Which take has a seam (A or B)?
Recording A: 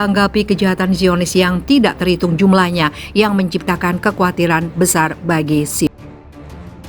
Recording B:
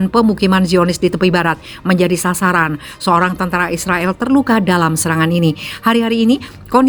A